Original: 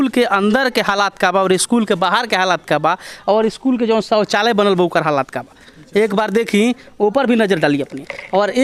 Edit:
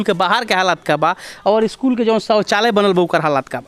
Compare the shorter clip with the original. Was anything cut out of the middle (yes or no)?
no